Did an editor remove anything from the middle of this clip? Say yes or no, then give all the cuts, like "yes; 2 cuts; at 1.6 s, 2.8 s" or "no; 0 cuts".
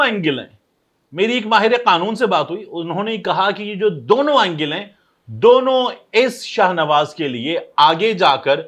no; 0 cuts